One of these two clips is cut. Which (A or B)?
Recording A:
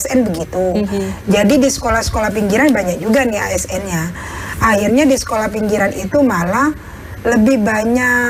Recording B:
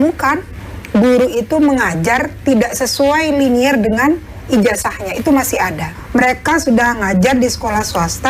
B